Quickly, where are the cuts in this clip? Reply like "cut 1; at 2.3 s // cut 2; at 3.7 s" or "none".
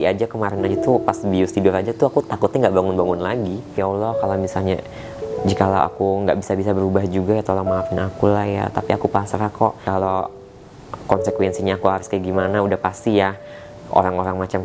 cut 1; at 3.8 s // cut 2; at 9.8 s